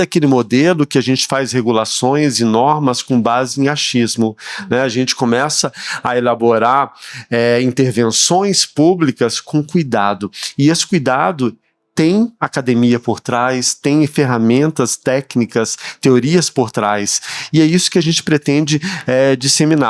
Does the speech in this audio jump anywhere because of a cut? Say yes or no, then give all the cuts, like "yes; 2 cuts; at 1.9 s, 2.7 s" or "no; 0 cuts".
no; 0 cuts